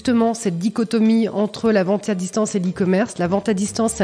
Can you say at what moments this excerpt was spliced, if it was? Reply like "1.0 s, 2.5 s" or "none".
none